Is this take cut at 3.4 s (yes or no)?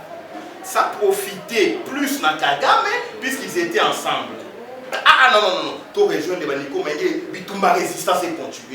no